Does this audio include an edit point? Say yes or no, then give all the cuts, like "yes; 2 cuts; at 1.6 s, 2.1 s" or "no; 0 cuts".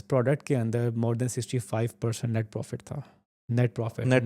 no; 0 cuts